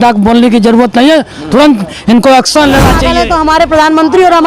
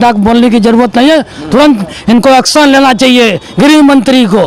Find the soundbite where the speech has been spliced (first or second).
first